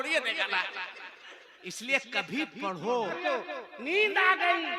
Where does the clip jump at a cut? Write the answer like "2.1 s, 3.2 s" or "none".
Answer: 3.2 s